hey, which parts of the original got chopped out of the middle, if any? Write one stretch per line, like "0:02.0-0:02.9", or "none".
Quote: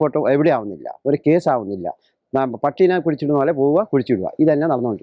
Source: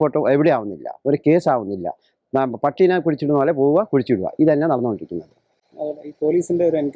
none